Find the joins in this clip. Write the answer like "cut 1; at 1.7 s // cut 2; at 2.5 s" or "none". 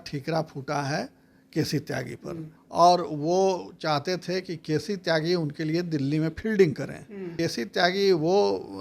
cut 1; at 2.5 s // cut 2; at 7.3 s